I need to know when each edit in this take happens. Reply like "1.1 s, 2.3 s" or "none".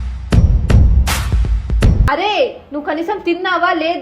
2.0 s